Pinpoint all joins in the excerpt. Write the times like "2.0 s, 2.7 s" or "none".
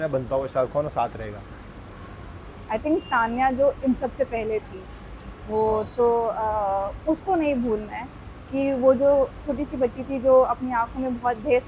none